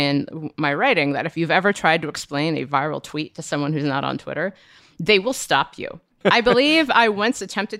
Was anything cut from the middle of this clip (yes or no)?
yes